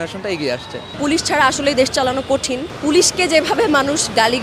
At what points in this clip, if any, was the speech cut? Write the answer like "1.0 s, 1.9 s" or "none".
1.0 s, 2.7 s